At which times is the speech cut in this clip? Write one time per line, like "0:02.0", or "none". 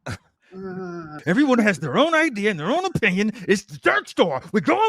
0:01.1